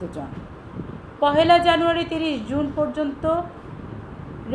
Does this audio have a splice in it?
no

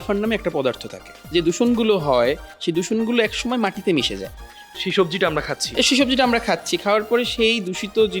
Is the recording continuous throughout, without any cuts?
no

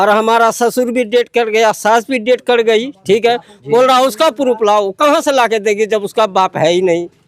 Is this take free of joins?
yes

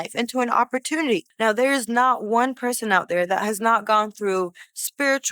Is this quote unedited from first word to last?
no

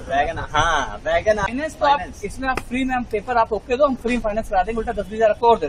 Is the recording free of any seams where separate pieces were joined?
no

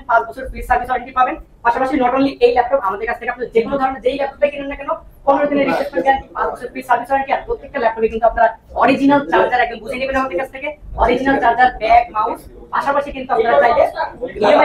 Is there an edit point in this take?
no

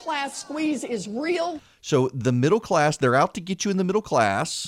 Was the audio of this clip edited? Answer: no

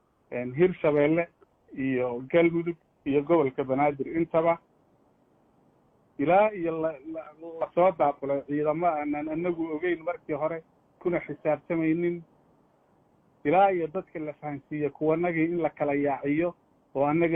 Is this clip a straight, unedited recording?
yes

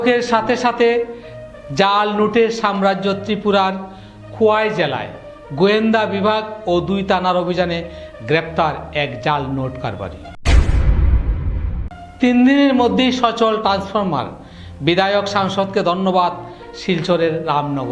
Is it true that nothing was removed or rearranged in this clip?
yes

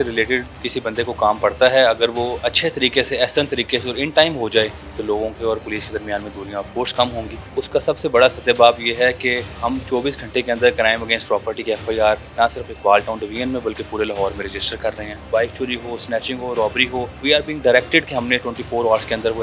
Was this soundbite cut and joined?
yes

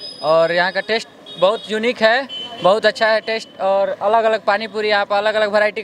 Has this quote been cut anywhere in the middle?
no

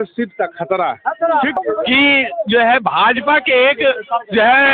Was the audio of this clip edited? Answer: yes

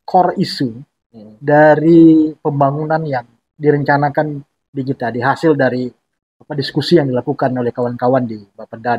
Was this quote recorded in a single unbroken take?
yes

